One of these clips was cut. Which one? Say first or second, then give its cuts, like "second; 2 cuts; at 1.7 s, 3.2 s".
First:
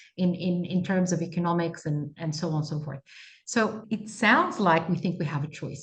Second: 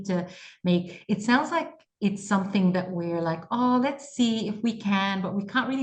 first; 1 cut; at 3.8 s